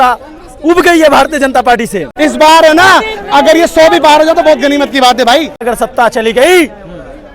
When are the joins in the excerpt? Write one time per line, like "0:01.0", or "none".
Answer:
0:02.1
0:05.7